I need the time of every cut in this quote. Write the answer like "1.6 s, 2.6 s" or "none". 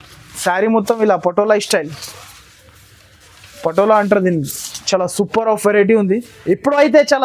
6.3 s